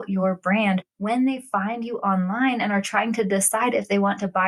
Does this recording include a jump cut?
no; 0 cuts

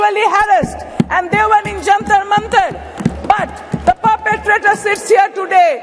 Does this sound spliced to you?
no; 0 cuts

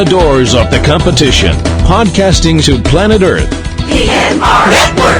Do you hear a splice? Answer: no; 0 cuts

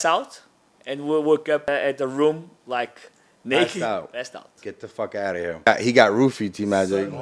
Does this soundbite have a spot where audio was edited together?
yes; 2 cuts; at 1.6 s, 5.7 s

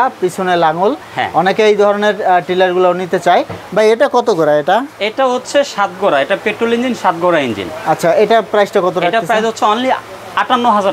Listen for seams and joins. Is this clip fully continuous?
yes; 0 cuts

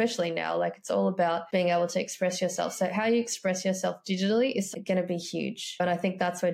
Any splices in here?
no; 0 cuts

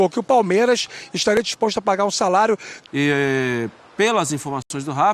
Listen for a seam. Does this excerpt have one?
yes; 1 cut; at 2.7 s

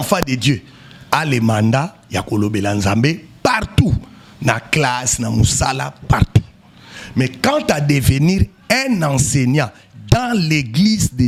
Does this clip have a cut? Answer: no; 0 cuts

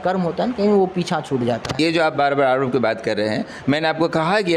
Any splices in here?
yes; 1 cut; at 1.7 s

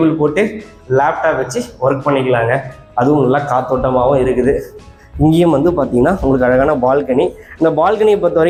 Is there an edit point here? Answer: no; 0 cuts

